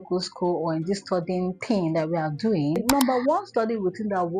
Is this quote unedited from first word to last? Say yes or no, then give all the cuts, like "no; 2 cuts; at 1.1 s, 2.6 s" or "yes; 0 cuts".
no; 1 cut; at 2.8 s